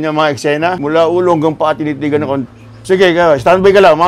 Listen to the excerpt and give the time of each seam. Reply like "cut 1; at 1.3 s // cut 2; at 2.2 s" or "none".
cut 1; at 2.8 s